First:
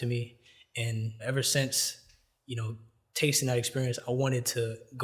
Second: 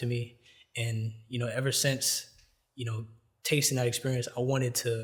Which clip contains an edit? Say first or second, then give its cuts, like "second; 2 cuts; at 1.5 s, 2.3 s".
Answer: first; 1 cut; at 1.2 s